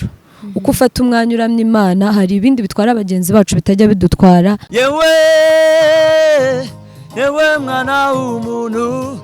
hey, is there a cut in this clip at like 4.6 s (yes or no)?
yes